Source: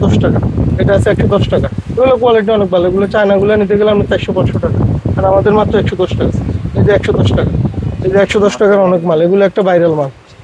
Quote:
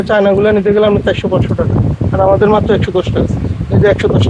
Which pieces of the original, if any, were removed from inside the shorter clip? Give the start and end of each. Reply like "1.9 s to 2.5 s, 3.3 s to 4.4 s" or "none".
none